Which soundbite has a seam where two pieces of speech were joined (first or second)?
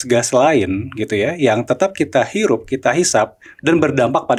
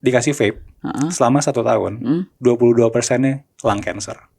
second